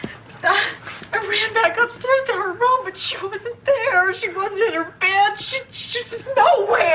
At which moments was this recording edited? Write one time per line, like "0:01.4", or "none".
none